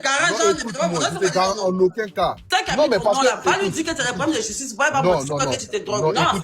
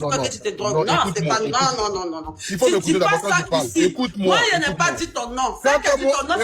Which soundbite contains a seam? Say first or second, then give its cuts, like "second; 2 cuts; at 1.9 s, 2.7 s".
first; 1 cut; at 2.4 s